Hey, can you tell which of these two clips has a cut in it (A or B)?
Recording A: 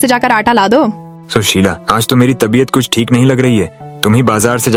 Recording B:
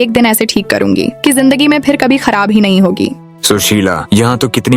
B